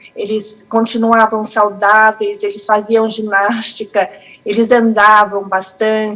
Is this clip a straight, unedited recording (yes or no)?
yes